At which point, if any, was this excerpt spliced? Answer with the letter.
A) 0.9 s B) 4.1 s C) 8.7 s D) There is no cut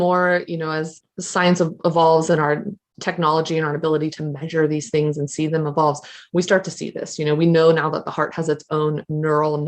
A